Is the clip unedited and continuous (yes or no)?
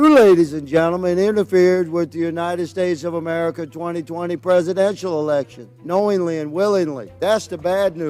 yes